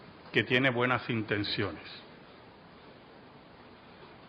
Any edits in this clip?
no; 0 cuts

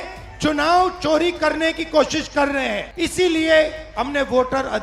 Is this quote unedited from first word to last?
no; 1 cut; at 2.9 s

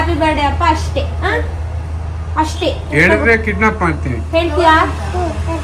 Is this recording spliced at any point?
no; 0 cuts

